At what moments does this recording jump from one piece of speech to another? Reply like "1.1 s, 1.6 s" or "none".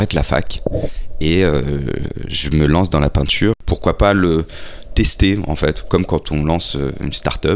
3.6 s